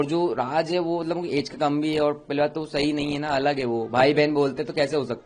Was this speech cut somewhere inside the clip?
no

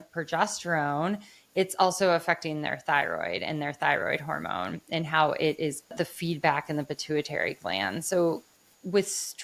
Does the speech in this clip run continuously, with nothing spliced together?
no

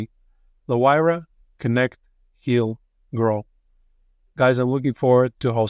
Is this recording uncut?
yes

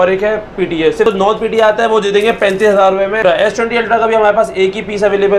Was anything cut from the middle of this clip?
yes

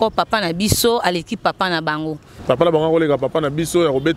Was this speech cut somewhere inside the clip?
yes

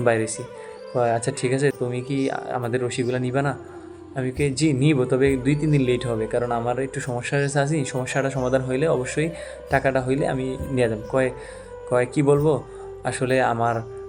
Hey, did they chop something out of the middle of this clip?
yes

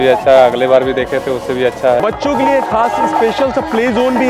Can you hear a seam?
yes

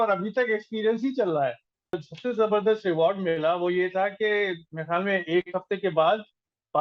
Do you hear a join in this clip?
yes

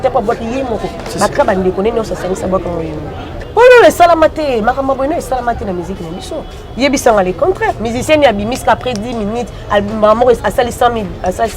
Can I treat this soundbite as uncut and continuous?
no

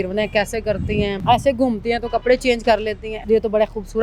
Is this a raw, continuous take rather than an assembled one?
no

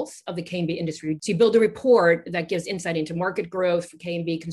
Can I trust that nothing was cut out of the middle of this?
no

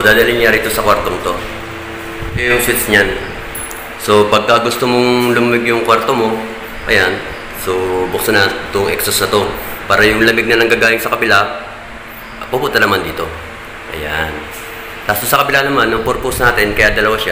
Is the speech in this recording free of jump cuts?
no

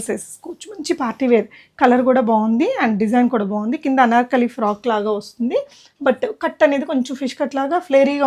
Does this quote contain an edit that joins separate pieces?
no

